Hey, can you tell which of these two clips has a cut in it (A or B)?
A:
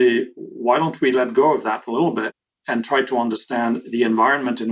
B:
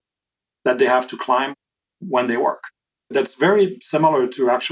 B